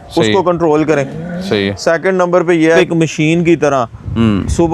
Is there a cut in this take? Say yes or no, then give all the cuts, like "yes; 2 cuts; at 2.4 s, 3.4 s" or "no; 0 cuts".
yes; 1 cut; at 2.8 s